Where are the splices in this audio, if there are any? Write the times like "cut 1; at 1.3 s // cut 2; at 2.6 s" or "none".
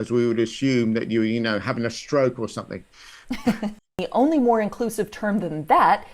cut 1; at 4.0 s